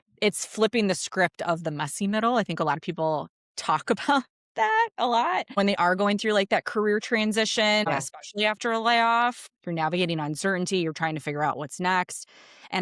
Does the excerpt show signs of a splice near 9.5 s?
yes; 3 cuts; at 5.6 s, 7.9 s, 9.5 s

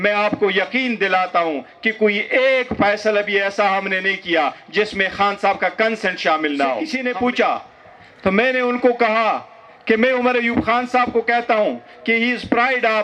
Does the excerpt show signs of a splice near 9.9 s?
no; 1 cut; at 7.0 s

